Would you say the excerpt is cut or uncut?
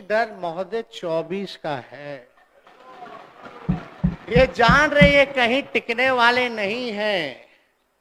uncut